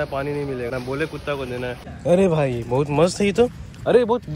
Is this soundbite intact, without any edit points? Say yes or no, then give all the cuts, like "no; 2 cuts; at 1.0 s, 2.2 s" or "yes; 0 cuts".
no; 2 cuts; at 0.7 s, 1.9 s